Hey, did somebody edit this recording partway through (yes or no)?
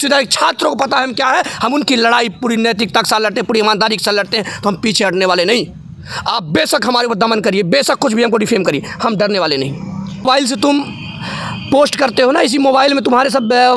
yes